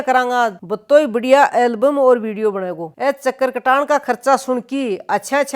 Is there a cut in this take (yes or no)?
yes